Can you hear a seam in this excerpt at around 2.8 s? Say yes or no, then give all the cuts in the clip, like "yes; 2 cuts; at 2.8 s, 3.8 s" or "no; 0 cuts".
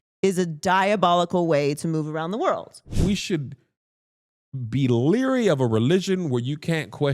yes; 1 cut; at 2.8 s